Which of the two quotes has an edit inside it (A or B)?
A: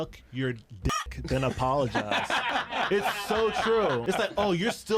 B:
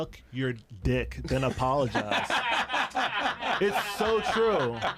A